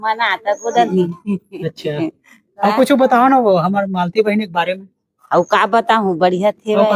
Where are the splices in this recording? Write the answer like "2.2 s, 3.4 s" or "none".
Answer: none